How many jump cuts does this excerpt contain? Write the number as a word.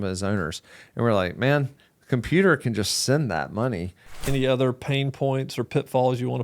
one